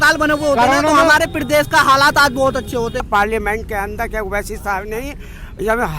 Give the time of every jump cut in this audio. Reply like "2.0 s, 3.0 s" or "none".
3.1 s